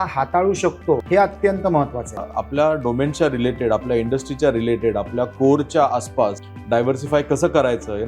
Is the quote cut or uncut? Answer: cut